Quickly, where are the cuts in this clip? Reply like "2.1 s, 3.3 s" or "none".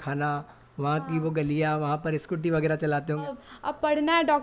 3.3 s